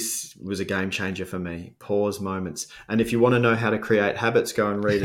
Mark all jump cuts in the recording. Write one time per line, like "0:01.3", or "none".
none